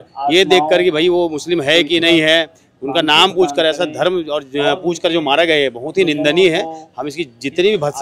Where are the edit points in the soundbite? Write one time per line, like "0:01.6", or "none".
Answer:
none